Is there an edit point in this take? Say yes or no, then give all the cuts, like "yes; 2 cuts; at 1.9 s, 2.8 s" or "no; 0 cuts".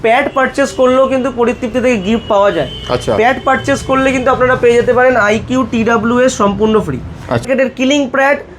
yes; 1 cut; at 7.4 s